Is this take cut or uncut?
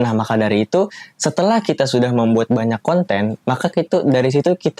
uncut